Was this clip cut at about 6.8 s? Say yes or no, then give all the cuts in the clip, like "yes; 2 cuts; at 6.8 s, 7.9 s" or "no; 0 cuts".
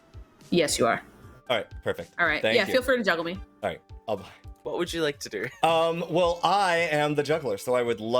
no; 2 cuts; at 1.3 s, 4.6 s